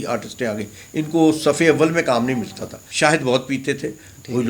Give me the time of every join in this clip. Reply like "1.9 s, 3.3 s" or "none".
2.8 s